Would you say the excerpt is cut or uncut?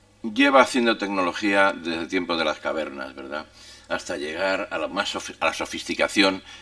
uncut